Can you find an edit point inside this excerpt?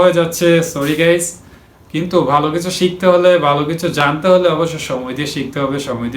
no; 0 cuts

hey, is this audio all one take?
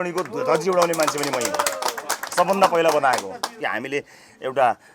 no; 1 cut; at 3.5 s

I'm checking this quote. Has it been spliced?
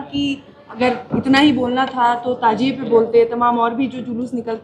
no; 0 cuts

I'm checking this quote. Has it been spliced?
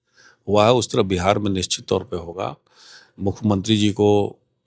no; 0 cuts

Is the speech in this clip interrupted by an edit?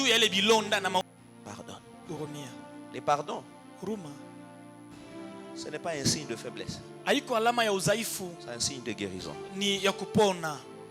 yes; 1 cut; at 1.0 s

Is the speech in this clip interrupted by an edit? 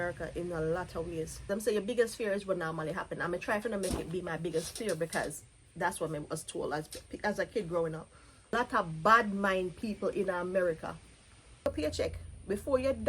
yes; 3 cuts; at 1.5 s, 8.5 s, 11.6 s

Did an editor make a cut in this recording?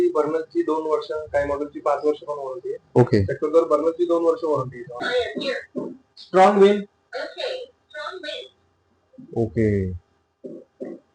yes; 1 cut; at 5.0 s

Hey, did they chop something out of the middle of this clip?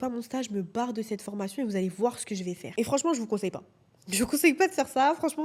no; 0 cuts

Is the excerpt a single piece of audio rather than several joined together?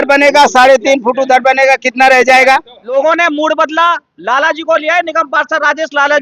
no; 1 cut; at 2.8 s

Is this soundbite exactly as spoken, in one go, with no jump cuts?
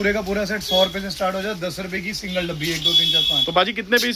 yes; 0 cuts

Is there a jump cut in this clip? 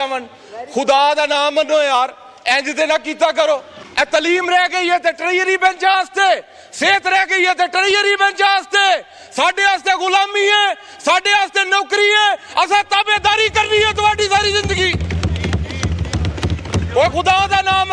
yes; 1 cut; at 3.8 s

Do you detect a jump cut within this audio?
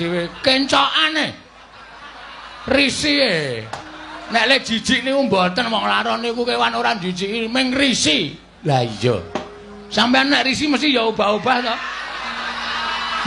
no; 0 cuts

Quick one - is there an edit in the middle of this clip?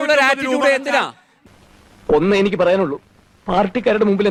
no; 0 cuts

